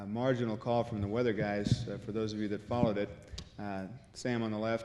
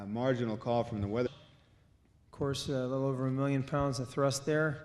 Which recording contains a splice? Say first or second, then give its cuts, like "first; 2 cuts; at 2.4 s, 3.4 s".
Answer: first; 1 cut; at 1.3 s